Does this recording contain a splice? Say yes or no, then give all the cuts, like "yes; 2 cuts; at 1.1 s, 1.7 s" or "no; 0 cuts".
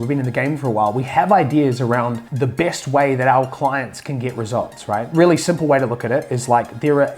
yes; 2 cuts; at 2.2 s, 5.1 s